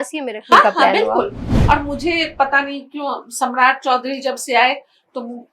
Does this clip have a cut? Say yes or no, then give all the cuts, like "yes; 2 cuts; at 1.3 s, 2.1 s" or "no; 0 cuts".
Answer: yes; 1 cut; at 1.5 s